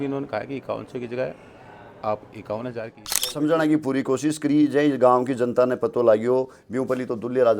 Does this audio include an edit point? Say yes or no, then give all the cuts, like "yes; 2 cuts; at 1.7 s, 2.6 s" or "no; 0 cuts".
yes; 1 cut; at 3.3 s